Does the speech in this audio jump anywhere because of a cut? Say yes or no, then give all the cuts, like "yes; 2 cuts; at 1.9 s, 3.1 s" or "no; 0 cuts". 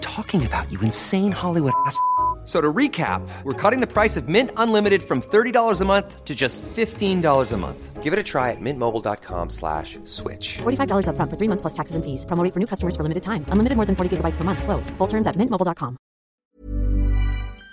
yes; 1 cut; at 16.4 s